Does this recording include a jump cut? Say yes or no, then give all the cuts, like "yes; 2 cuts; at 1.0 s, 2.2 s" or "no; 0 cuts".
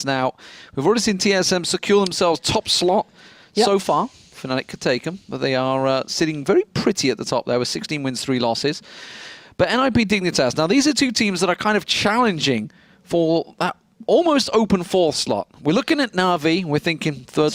no; 0 cuts